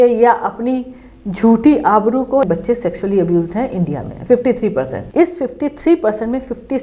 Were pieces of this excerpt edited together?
yes; 2 cuts; at 2.4 s, 5.0 s

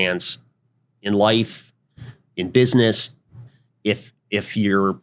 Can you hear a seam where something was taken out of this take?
no; 0 cuts

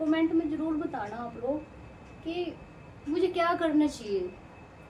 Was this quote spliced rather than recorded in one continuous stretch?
no; 0 cuts

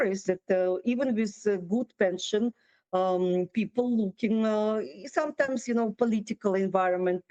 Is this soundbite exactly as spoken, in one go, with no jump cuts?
yes; 0 cuts

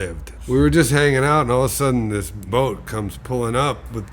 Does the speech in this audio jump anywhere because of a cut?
yes; 1 cut; at 2.5 s

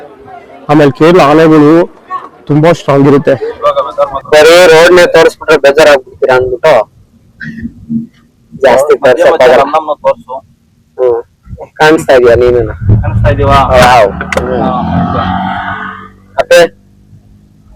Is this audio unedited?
no; 1 cut; at 3.5 s

